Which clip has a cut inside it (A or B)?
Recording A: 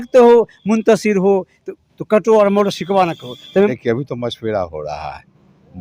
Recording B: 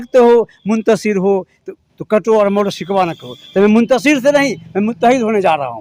A